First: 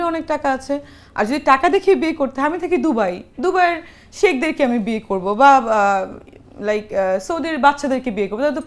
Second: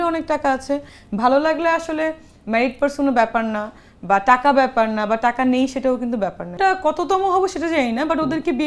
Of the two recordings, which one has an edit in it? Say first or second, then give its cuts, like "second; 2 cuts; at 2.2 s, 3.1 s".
second; 2 cuts; at 1.0 s, 6.6 s